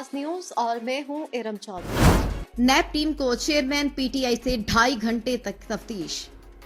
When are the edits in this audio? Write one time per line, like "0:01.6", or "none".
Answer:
0:01.8